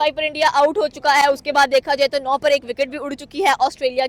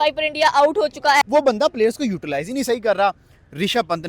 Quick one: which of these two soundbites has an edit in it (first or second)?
second